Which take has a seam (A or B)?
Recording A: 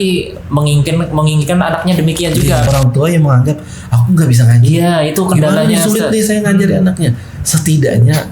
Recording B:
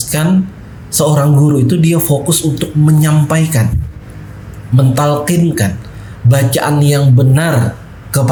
A